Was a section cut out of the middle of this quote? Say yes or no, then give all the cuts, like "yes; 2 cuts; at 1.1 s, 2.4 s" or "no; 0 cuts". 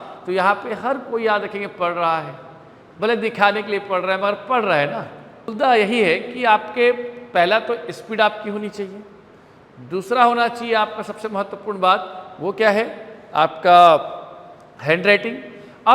yes; 1 cut; at 5.4 s